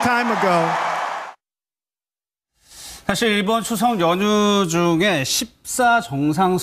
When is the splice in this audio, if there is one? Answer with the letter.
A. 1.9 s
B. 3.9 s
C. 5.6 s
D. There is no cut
D